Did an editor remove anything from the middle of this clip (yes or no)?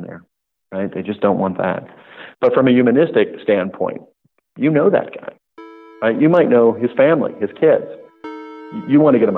no